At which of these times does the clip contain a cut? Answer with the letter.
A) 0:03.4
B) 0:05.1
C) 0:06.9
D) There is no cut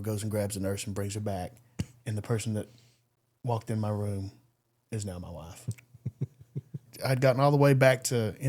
C